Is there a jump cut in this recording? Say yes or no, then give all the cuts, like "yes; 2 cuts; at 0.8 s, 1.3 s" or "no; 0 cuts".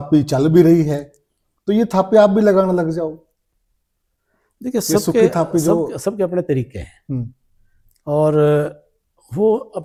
no; 0 cuts